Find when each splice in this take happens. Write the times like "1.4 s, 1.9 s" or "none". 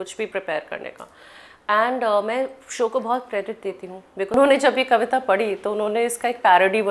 4.3 s